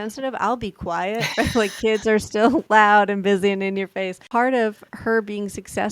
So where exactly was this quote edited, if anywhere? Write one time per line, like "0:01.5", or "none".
0:04.2